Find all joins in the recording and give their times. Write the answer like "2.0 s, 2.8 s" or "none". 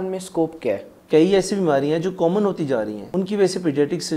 0.9 s, 3.0 s